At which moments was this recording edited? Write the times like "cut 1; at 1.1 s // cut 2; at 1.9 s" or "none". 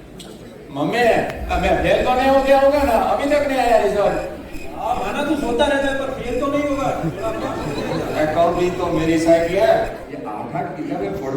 cut 1; at 10.1 s